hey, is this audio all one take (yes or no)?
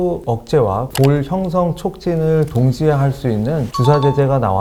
yes